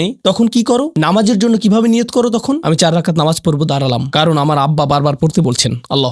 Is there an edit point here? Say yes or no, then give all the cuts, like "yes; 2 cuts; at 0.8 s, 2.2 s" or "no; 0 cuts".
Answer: no; 0 cuts